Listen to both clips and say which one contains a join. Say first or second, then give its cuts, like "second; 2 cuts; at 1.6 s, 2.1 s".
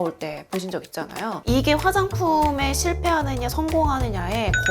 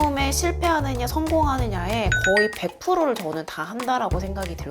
first; 1 cut; at 1.4 s